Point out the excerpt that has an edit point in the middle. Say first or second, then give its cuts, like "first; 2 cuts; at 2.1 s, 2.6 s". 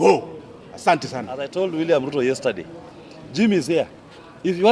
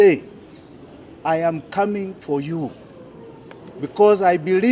first; 1 cut; at 1.5 s